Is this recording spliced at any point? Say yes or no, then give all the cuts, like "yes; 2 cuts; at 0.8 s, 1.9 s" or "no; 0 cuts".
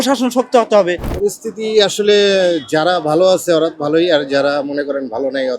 yes; 1 cut; at 1.1 s